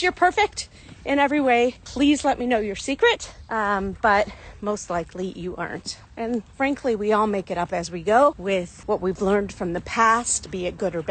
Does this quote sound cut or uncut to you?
uncut